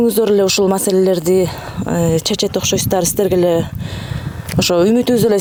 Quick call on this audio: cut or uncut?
uncut